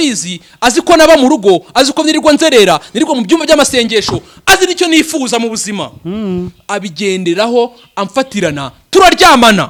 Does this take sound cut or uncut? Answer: uncut